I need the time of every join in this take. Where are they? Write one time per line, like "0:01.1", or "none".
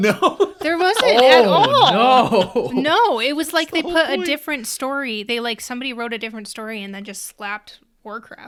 none